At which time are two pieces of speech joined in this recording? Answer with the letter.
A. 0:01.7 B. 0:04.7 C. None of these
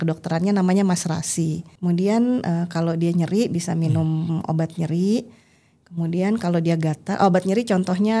A